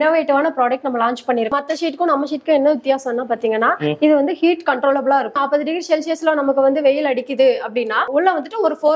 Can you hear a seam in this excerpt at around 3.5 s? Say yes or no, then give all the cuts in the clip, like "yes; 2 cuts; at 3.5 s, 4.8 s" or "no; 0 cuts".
no; 3 cuts; at 1.5 s, 5.3 s, 8.1 s